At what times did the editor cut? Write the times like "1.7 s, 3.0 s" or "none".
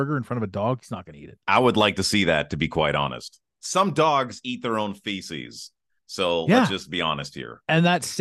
3.5 s